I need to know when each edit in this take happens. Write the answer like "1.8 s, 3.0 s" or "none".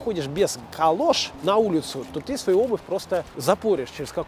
1.3 s, 3.3 s